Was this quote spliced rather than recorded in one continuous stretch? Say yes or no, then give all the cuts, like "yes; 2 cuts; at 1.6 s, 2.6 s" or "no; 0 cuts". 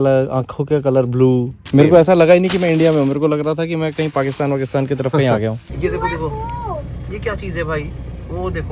yes; 2 cuts; at 1.6 s, 5.7 s